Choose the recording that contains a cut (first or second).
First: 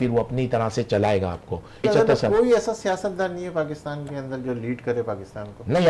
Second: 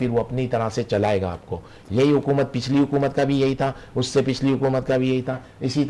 first